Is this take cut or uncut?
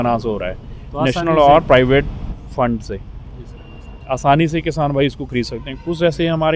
uncut